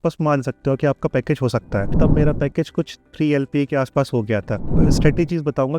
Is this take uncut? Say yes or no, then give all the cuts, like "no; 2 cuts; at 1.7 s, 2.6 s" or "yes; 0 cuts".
no; 2 cuts; at 2.0 s, 4.6 s